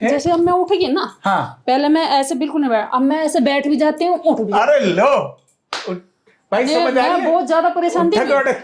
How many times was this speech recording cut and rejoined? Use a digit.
0